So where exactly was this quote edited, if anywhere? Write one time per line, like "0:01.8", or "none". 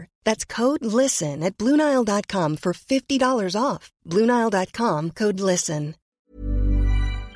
0:06.2